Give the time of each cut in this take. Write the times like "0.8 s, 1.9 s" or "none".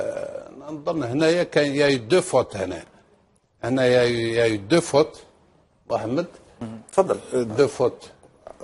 1.7 s